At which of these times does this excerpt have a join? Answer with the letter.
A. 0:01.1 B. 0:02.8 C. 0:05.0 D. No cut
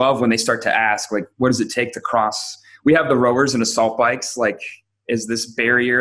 D